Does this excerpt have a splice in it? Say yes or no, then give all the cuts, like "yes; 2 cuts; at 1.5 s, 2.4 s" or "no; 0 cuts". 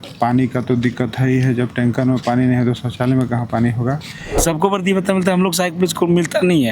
yes; 1 cut; at 4.4 s